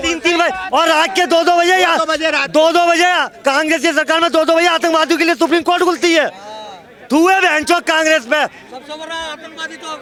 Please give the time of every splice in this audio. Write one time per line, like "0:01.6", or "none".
none